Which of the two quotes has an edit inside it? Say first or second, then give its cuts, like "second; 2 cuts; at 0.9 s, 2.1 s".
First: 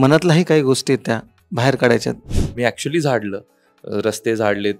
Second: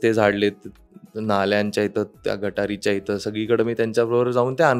first; 1 cut; at 2.3 s